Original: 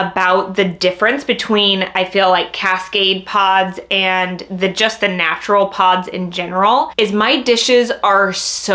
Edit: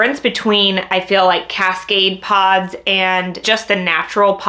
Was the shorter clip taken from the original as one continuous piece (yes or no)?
no